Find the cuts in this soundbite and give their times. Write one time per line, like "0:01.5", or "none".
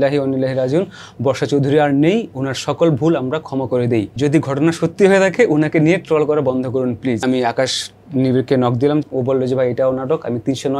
0:04.1
0:07.2
0:09.0

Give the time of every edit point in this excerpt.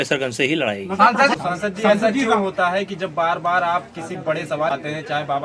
0:01.4
0:04.7

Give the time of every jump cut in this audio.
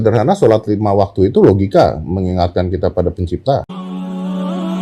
0:03.8

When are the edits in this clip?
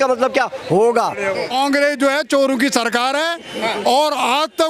0:01.5

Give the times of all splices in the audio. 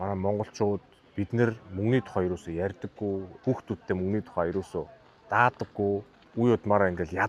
0:03.3
0:06.2

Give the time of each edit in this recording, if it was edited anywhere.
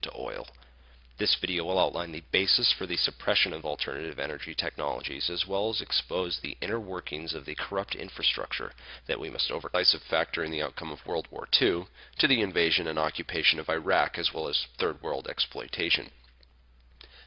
none

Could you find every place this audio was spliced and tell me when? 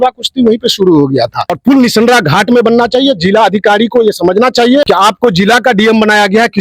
0:01.6
0:04.9

